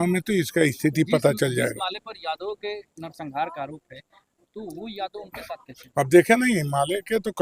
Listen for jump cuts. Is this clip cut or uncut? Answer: uncut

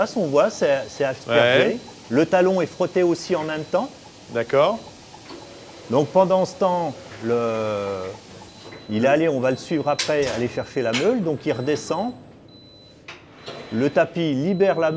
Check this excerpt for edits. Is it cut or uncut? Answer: uncut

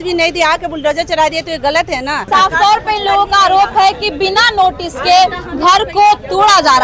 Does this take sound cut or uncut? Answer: cut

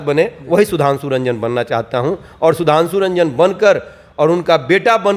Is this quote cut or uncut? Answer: uncut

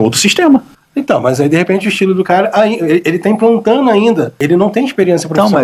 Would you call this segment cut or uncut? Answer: cut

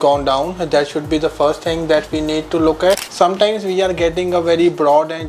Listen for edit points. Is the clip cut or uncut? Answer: cut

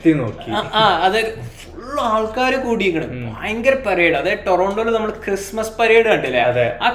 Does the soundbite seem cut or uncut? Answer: uncut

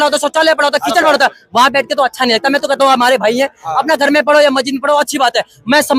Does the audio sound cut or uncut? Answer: uncut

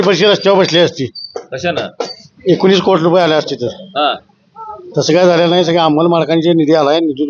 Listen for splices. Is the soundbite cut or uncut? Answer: uncut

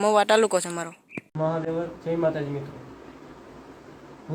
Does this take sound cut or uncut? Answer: uncut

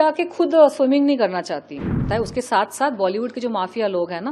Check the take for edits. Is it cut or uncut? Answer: cut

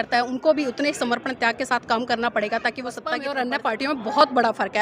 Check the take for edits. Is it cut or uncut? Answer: cut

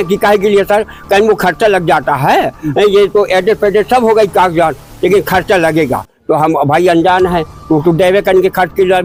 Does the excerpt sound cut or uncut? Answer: uncut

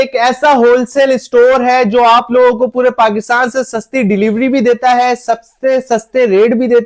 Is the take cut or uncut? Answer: uncut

